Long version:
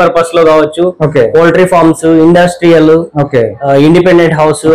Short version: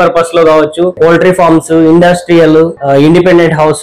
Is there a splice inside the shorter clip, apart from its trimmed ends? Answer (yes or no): yes